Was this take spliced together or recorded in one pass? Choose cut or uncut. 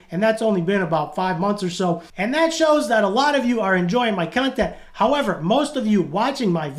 uncut